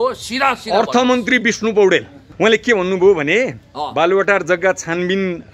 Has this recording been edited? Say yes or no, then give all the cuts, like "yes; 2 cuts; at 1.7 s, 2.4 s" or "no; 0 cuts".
yes; 1 cut; at 2.2 s